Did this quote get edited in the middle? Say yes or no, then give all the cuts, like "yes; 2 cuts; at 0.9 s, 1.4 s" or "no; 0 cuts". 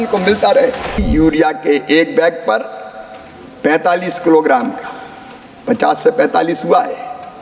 yes; 1 cut; at 1.0 s